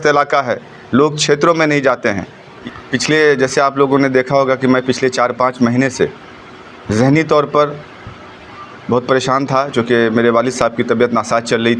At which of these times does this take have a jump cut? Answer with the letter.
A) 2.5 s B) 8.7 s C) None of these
A